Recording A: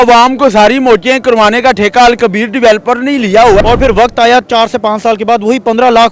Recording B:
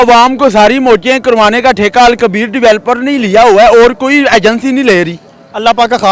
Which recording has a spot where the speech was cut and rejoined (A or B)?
A